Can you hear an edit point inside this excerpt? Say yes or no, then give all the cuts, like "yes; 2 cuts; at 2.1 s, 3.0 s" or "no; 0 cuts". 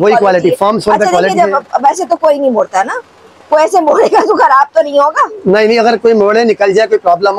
no; 0 cuts